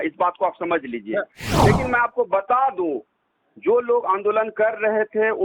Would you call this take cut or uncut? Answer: cut